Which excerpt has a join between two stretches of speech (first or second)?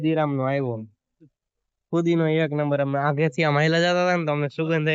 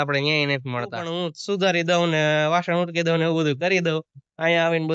second